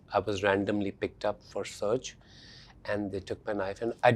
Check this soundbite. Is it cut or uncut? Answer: uncut